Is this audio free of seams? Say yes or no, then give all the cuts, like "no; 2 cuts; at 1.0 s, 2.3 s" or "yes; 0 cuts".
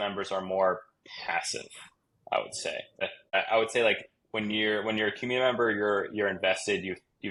yes; 0 cuts